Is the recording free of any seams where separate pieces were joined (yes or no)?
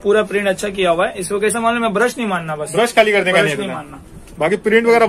yes